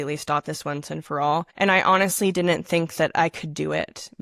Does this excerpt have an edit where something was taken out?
yes; 1 cut; at 1.5 s

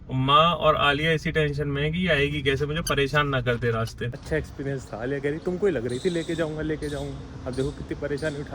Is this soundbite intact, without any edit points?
no; 1 cut; at 4.0 s

